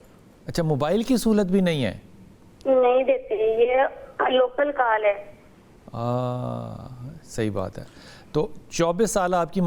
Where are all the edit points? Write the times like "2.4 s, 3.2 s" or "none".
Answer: none